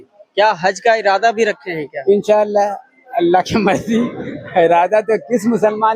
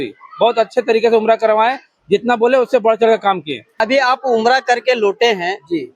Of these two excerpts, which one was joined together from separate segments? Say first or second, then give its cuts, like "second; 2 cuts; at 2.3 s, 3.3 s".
second; 1 cut; at 3.8 s